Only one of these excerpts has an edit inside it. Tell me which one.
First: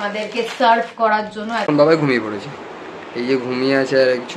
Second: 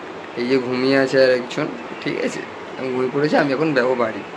first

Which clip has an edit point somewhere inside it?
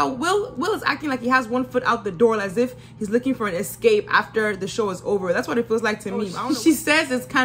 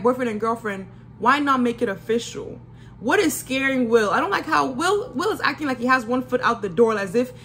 first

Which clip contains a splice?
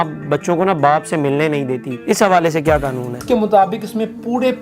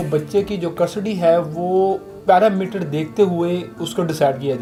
first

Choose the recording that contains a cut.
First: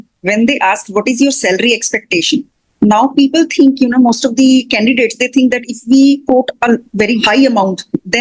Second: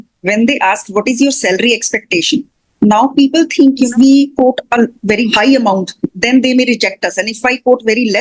second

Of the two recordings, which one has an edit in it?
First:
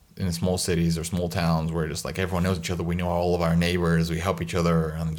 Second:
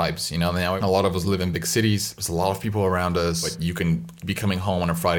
second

